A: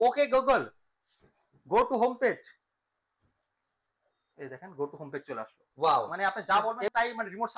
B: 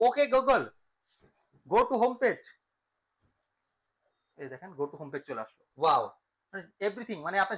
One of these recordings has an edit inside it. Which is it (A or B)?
A